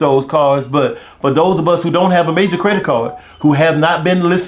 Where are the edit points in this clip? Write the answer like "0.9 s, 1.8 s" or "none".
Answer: none